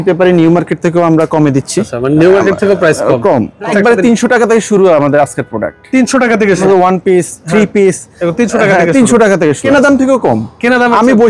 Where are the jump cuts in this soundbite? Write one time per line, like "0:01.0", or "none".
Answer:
0:01.9
0:03.7
0:06.6
0:09.6